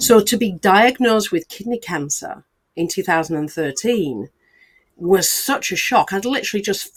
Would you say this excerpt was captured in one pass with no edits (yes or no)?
yes